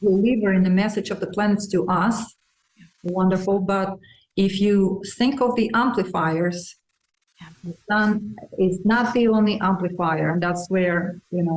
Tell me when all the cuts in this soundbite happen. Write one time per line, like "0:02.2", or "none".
none